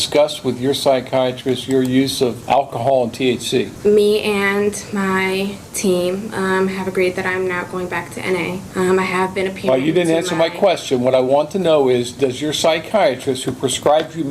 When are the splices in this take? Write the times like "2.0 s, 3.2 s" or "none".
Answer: 2.4 s, 3.7 s, 8.6 s